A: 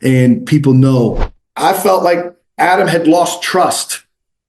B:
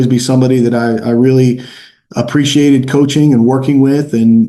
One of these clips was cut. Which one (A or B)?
A